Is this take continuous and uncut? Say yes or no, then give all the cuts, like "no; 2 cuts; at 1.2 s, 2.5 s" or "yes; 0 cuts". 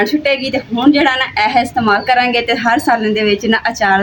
yes; 0 cuts